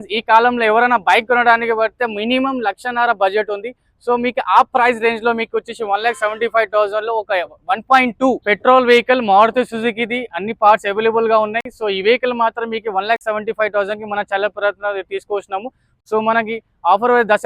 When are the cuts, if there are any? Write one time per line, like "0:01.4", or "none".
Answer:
0:08.4
0:15.9